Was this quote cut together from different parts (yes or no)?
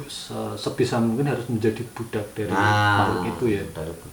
no